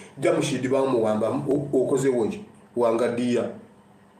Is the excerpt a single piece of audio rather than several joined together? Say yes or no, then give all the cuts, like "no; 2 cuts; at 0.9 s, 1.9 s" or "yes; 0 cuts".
yes; 0 cuts